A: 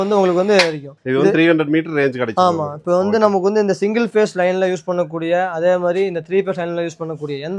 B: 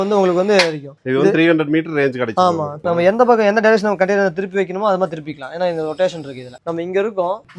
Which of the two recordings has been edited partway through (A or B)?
B